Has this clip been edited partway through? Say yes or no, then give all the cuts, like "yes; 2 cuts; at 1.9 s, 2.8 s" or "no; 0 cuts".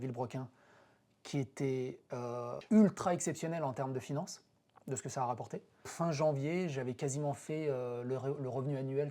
yes; 2 cuts; at 2.6 s, 5.9 s